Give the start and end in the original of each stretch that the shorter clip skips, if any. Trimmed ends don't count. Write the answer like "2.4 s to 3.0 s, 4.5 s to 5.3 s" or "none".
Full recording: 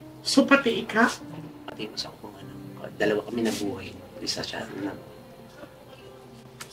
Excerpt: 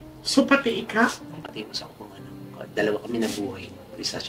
1.4 s to 1.6 s

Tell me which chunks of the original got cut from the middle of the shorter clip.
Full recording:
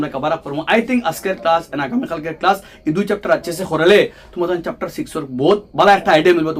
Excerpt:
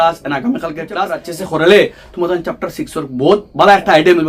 2.8 s to 3.5 s

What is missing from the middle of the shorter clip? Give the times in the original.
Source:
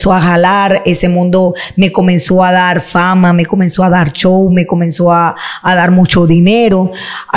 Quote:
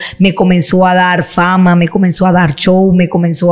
none

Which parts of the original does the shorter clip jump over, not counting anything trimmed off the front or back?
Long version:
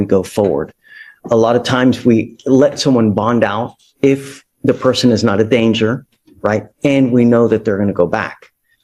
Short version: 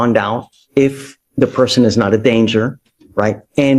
none

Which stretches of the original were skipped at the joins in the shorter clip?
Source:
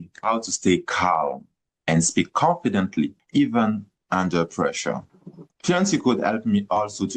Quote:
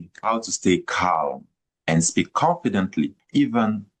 none

